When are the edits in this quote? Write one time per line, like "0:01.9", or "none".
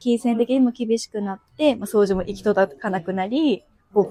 none